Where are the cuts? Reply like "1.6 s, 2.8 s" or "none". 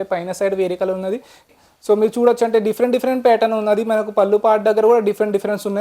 1.4 s